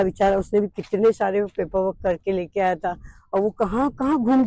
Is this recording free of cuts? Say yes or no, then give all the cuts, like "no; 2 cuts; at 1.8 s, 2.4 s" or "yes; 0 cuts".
yes; 0 cuts